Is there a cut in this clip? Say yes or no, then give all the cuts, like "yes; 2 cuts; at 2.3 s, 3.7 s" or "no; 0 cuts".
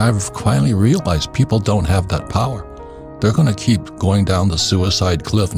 no; 0 cuts